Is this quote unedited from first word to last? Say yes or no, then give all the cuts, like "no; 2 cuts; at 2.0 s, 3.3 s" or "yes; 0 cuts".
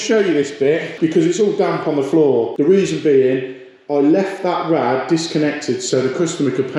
no; 2 cuts; at 0.9 s, 2.5 s